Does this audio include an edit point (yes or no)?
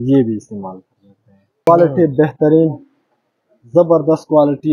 yes